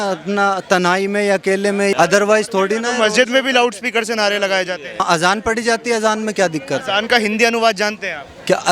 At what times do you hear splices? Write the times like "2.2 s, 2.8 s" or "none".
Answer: 1.9 s, 5.0 s